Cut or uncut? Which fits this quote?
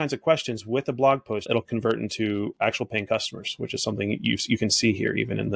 cut